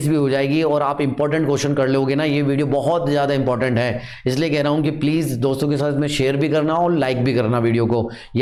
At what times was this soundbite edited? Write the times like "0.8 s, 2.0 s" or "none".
none